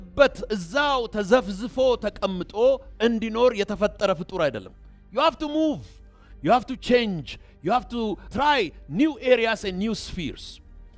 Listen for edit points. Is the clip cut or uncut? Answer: uncut